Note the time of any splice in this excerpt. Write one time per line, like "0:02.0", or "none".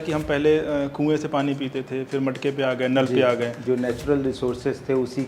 0:03.6